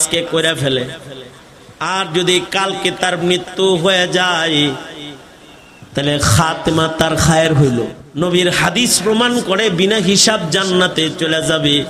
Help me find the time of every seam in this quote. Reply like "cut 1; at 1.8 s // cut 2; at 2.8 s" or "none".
cut 1; at 8.0 s

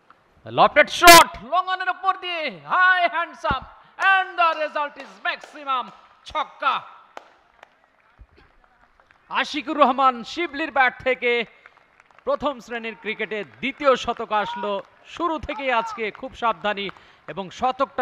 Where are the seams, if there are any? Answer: none

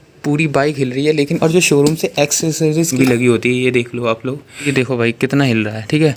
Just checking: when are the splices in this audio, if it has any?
cut 1; at 1.3 s // cut 2; at 2.9 s // cut 3; at 4.7 s

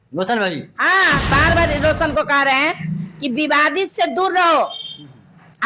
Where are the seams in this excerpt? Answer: cut 1; at 1.3 s

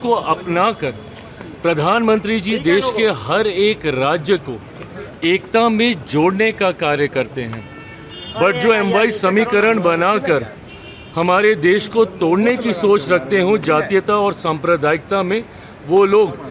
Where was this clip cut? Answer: none

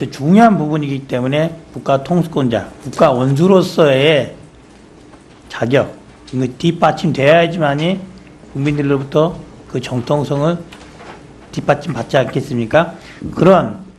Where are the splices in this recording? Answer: none

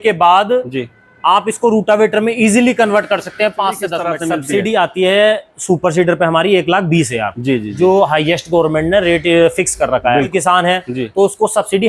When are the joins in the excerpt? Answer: cut 1; at 4.1 s // cut 2; at 10.3 s

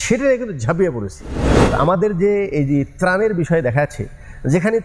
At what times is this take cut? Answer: cut 1; at 1.5 s

